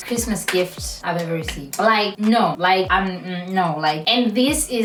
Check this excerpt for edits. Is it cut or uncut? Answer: uncut